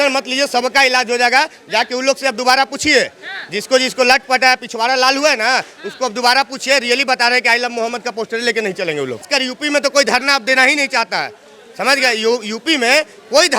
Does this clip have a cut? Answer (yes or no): yes